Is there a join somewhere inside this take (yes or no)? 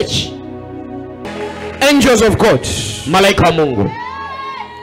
yes